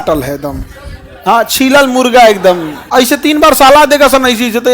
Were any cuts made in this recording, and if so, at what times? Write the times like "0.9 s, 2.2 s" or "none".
2.8 s